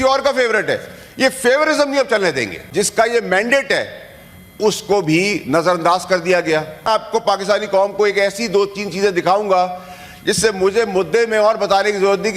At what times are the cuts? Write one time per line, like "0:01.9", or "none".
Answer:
0:02.5
0:06.9